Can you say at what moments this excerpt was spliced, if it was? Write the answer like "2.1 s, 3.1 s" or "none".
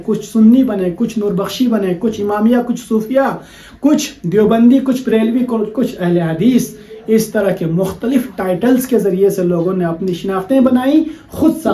none